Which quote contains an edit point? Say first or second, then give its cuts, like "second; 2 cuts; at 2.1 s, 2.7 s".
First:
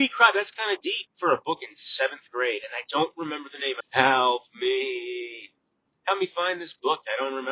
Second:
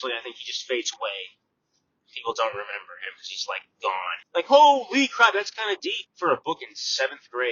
first; 1 cut; at 3.8 s